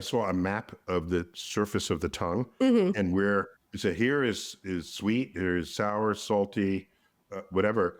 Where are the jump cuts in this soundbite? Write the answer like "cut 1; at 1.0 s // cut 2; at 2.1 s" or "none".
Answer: none